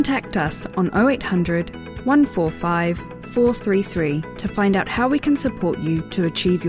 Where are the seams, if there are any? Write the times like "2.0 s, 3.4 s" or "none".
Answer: none